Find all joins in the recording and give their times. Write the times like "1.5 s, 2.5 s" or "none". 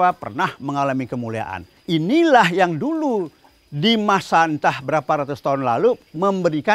1.8 s